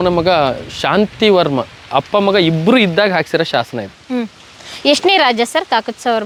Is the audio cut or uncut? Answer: uncut